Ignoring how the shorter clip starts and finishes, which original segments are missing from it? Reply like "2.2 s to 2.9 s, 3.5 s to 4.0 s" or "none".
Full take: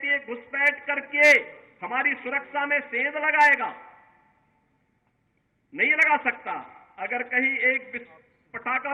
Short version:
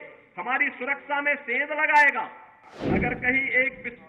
4.2 s to 6.8 s

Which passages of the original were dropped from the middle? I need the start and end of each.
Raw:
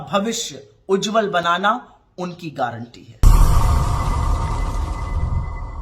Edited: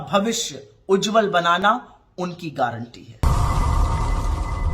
3.2 s to 3.7 s

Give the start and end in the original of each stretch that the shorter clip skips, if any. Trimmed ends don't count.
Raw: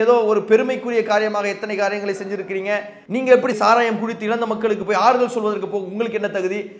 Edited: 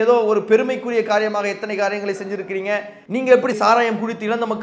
none

